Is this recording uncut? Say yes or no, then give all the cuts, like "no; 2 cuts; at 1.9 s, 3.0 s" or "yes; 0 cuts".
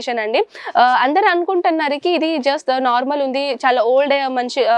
yes; 0 cuts